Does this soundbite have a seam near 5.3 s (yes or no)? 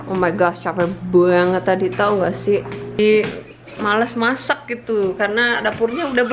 no